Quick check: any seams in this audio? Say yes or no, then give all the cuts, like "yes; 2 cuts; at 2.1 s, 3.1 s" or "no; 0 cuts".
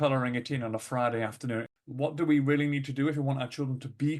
yes; 1 cut; at 1.7 s